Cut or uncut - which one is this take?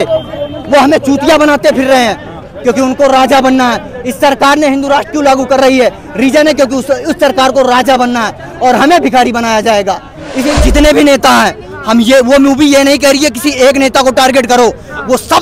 cut